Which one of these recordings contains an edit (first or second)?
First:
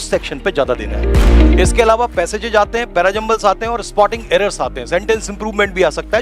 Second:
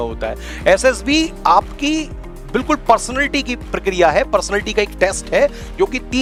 first